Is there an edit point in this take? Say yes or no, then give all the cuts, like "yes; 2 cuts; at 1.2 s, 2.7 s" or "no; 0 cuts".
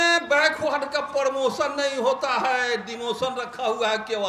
no; 0 cuts